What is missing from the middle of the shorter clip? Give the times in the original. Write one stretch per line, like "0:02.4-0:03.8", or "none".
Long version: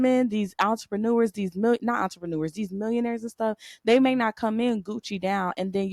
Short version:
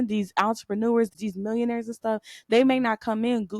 0:01.4-0:02.5